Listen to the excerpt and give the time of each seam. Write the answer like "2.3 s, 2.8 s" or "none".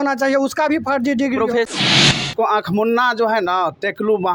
2.1 s